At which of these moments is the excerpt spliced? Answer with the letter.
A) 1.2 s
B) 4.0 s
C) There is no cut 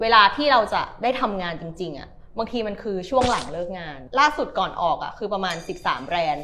B